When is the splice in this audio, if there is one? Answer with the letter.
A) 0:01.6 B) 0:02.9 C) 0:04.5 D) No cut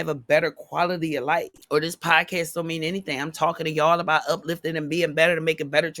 A